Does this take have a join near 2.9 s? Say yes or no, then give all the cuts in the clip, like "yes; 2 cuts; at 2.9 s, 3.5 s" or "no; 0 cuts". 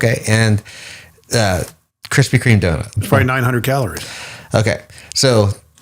yes; 1 cut; at 2.9 s